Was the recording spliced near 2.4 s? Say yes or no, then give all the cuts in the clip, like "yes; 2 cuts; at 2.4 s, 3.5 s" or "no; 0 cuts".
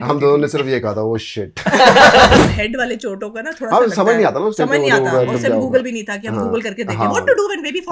yes; 1 cut; at 2.4 s